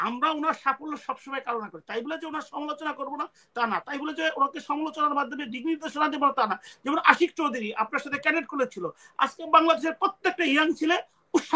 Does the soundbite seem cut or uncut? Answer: uncut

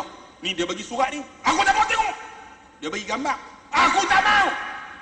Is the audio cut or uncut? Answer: uncut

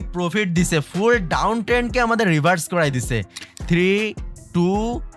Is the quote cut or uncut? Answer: cut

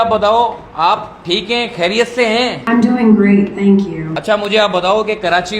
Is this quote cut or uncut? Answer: cut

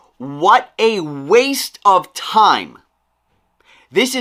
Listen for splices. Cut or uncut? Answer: uncut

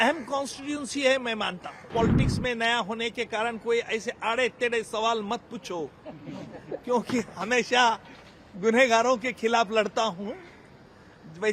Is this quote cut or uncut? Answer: cut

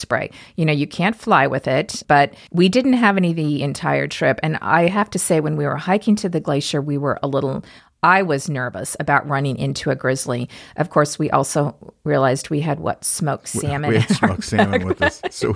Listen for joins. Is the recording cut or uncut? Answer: uncut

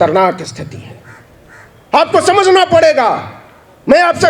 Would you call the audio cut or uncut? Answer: uncut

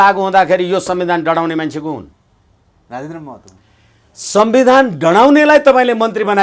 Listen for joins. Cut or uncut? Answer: uncut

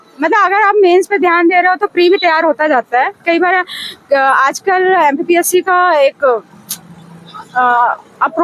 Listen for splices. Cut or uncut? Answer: uncut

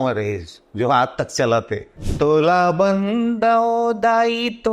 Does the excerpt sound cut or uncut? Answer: cut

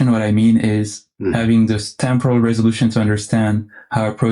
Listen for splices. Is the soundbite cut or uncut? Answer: cut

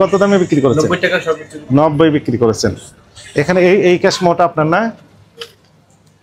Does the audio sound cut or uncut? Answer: uncut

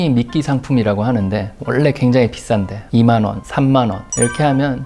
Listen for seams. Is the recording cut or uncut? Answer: uncut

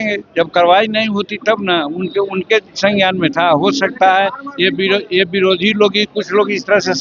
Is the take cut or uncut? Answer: uncut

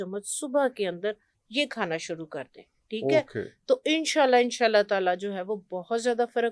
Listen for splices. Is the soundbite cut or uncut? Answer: uncut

